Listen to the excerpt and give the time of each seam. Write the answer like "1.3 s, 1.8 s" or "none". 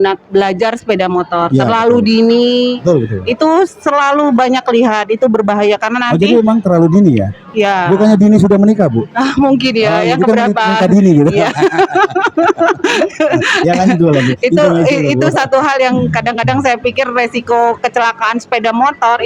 none